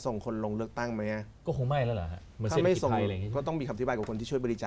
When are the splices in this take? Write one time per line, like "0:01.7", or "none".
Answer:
none